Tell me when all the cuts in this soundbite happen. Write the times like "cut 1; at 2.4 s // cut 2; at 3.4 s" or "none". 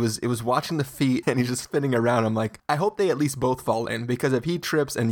cut 1; at 1.2 s // cut 2; at 2.6 s

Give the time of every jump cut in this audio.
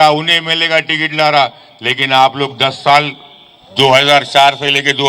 none

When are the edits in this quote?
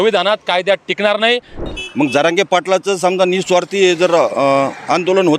cut 1; at 1.5 s

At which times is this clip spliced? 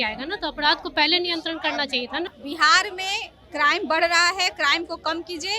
cut 1; at 2.3 s

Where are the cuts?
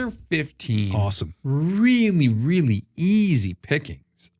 none

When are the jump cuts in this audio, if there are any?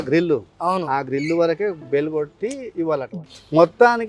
cut 1; at 3.1 s

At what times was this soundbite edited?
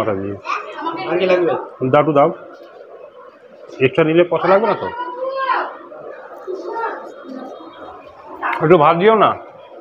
cut 1; at 7.9 s

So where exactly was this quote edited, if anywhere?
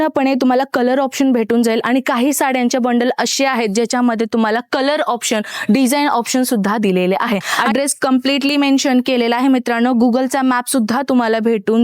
cut 1; at 7.5 s

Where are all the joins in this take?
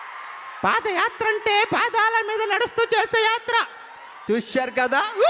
cut 1; at 4.1 s

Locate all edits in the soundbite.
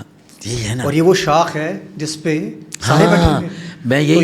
none

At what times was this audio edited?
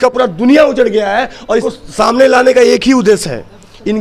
cut 1; at 1.4 s

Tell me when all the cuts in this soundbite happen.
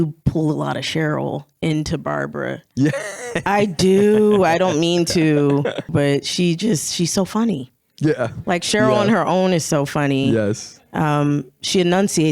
cut 1; at 5.9 s

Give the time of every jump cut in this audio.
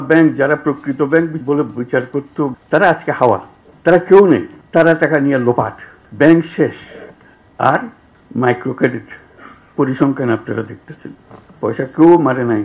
cut 1; at 1.4 s // cut 2; at 2.6 s

